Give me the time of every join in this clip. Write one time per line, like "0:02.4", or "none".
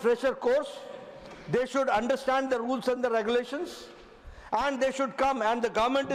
none